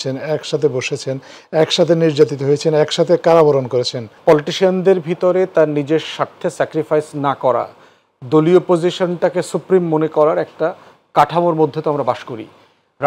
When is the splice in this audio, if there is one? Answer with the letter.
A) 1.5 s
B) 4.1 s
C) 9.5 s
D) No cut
B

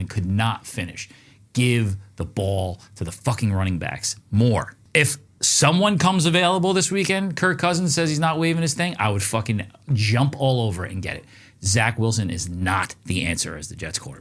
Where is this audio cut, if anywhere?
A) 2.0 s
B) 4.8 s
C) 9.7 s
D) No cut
B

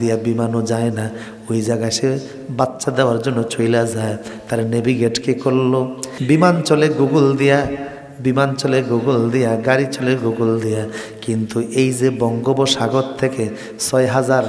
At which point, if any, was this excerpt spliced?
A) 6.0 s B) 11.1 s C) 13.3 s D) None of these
A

